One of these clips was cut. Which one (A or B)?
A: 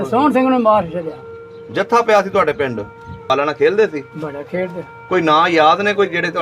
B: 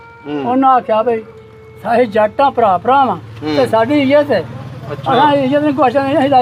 A